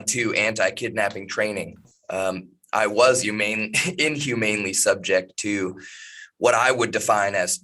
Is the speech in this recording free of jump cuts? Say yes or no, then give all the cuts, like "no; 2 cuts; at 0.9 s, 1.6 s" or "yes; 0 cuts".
yes; 0 cuts